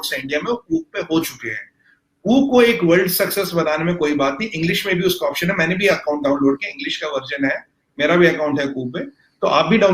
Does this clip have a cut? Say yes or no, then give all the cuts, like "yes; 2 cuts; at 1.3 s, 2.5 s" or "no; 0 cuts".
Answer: no; 0 cuts